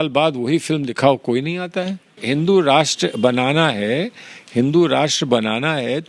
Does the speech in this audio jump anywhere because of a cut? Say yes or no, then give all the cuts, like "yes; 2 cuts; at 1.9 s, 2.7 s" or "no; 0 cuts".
yes; 1 cut; at 2.1 s